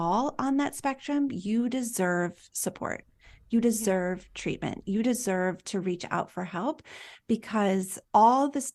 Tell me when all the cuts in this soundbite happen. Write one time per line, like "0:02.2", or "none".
none

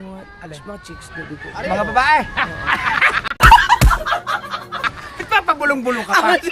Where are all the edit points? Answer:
none

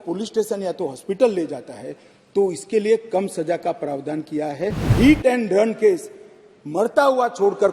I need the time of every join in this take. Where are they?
0:04.9

